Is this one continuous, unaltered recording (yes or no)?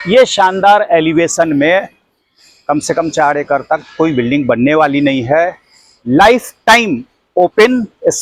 yes